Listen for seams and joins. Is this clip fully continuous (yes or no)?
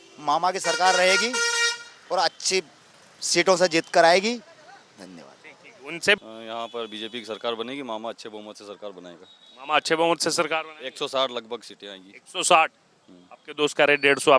no